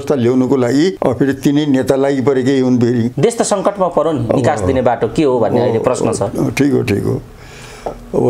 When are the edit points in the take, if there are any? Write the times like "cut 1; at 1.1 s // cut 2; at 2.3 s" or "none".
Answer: cut 1; at 1.0 s // cut 2; at 3.1 s